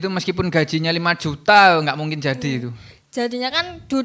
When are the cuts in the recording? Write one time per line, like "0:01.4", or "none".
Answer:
none